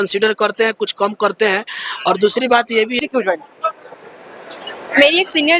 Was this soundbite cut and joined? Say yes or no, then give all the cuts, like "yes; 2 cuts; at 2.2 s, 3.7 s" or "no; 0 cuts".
yes; 1 cut; at 2.9 s